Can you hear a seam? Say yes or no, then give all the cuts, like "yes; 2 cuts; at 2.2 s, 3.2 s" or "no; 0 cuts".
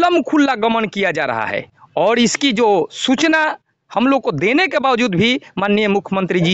no; 0 cuts